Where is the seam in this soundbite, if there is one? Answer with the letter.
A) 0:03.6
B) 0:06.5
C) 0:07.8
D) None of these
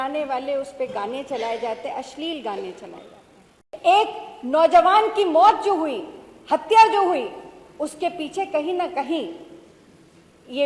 A